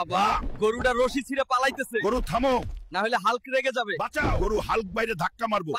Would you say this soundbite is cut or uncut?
uncut